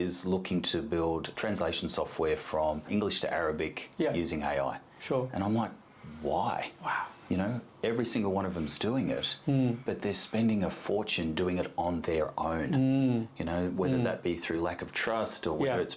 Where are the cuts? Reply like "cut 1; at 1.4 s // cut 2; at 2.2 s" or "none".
cut 1; at 1.3 s // cut 2; at 2.9 s